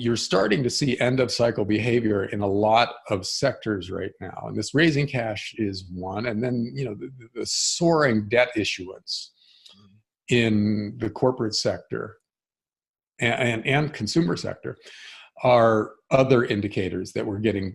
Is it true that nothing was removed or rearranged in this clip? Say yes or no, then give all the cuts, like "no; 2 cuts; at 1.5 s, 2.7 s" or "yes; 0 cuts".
yes; 0 cuts